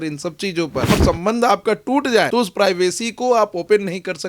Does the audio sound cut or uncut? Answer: cut